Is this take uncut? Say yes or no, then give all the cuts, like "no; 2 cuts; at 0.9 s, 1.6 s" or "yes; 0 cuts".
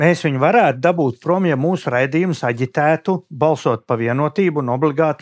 yes; 0 cuts